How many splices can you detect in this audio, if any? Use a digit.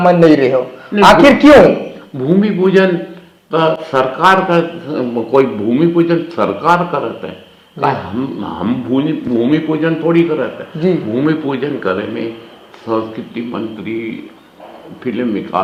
0